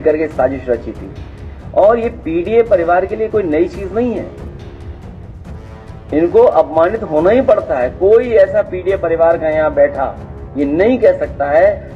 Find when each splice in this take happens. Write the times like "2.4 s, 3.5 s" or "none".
none